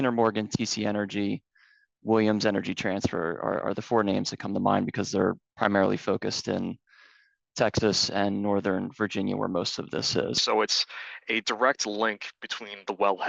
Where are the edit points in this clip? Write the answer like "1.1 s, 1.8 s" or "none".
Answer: 10.4 s